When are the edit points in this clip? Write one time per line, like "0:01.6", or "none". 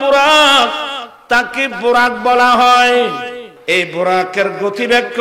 0:03.5